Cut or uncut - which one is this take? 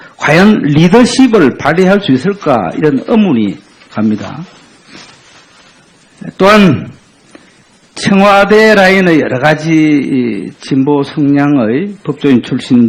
cut